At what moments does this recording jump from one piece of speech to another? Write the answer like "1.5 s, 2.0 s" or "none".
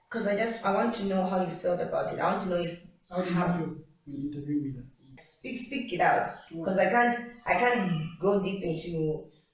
5.2 s